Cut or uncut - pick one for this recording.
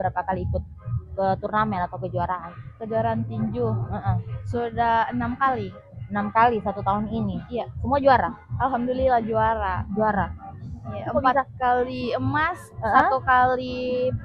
uncut